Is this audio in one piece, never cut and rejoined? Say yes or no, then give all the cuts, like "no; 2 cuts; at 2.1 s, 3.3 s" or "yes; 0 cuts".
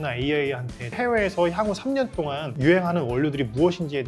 no; 1 cut; at 0.9 s